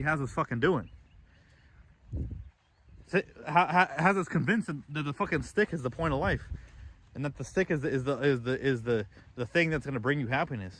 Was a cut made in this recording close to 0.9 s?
no; 0 cuts

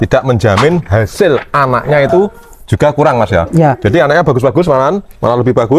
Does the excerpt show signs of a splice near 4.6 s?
no; 0 cuts

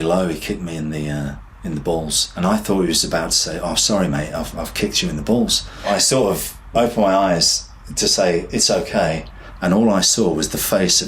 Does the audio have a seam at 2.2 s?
yes; 1 cut; at 2.2 s

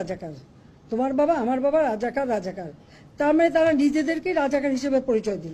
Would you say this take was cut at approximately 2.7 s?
no; 0 cuts

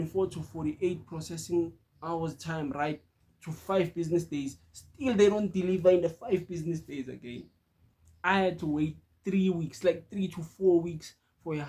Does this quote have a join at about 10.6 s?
no; 0 cuts

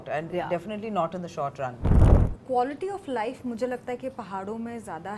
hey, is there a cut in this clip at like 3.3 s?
no; 1 cut; at 1.9 s

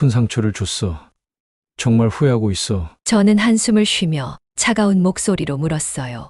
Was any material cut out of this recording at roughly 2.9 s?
no; 0 cuts

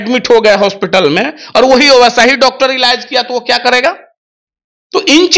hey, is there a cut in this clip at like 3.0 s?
no; 0 cuts

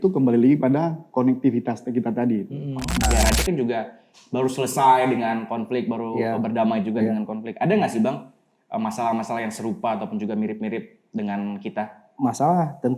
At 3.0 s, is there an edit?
yes; 1 cut; at 3.0 s

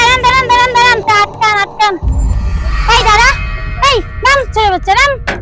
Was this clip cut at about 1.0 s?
yes; 1 cut; at 1.0 s

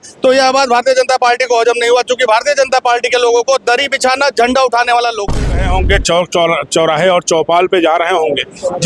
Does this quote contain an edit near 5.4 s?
yes; 1 cut; at 5.4 s

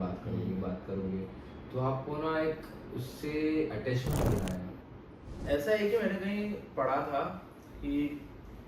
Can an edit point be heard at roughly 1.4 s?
no; 1 cut; at 4.8 s

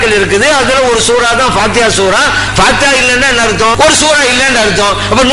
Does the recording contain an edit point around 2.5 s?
yes; 2 cuts; at 2.5 s, 3.7 s

